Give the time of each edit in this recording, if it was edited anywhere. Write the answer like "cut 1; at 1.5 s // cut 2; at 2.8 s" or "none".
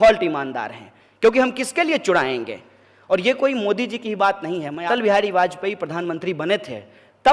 cut 1; at 4.9 s